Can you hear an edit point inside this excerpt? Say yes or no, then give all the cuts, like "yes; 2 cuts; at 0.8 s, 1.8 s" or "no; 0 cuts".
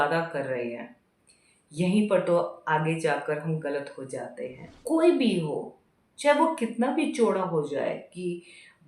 yes; 1 cut; at 4.6 s